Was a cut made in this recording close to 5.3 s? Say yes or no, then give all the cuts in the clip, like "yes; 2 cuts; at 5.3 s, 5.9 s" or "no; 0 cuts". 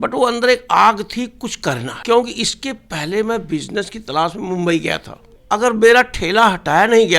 yes; 2 cuts; at 1.9 s, 5.3 s